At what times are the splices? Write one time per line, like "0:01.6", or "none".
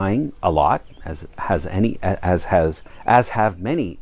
0:02.9